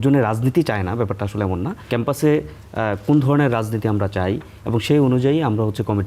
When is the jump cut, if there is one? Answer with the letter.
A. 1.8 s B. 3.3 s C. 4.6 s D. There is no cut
A